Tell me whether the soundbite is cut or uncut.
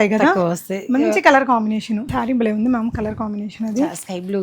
cut